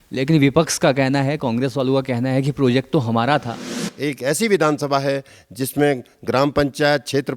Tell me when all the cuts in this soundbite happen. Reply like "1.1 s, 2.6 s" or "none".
3.7 s